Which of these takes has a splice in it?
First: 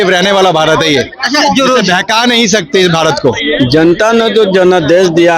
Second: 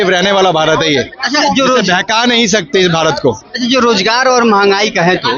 first; 1 cut; at 3.4 s

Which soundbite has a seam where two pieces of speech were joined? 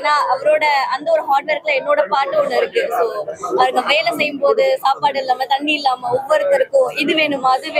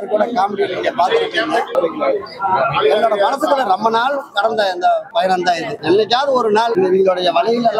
second; 3 cuts; at 1.7 s, 5.2 s, 6.7 s

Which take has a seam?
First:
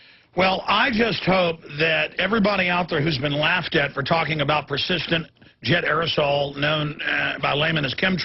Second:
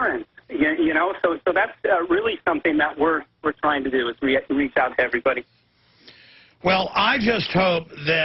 first; 1 cut; at 7.2 s

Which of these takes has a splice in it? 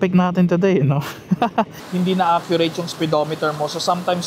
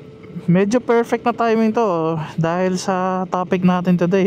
first; 1 cut; at 1.8 s

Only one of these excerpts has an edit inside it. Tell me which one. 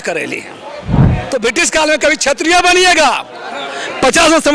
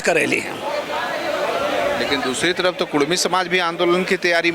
first; 1 cut; at 1.0 s

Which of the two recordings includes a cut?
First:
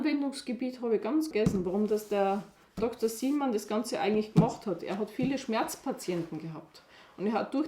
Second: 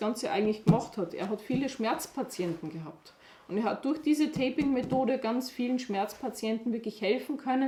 first; 1 cut; at 1.3 s

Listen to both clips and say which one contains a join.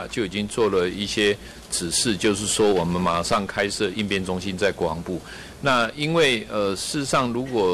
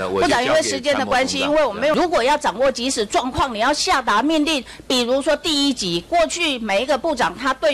second; 1 cut; at 1.9 s

